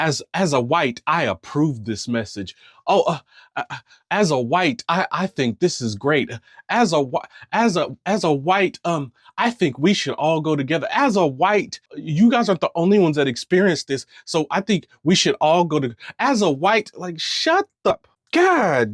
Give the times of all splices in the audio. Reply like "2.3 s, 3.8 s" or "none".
17.9 s